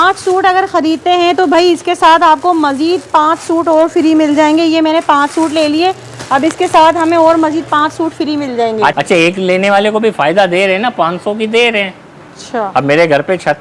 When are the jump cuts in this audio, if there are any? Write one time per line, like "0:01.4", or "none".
0:08.9